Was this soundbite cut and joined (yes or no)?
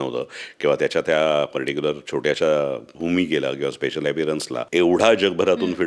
yes